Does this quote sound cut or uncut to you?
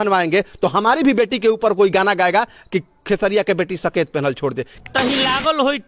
cut